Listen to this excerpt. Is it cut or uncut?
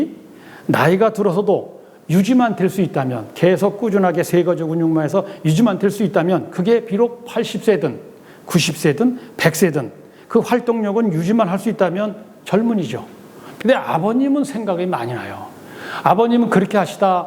cut